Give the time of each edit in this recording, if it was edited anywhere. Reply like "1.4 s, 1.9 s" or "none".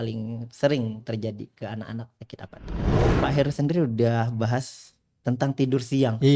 3.0 s